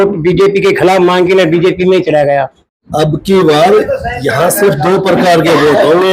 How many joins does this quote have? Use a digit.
1